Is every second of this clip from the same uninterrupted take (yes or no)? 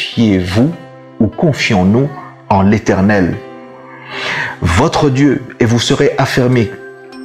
yes